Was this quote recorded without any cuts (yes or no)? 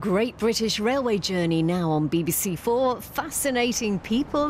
yes